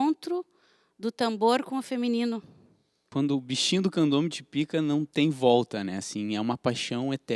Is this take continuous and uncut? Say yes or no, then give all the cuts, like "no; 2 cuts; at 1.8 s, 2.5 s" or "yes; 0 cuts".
no; 1 cut; at 2.9 s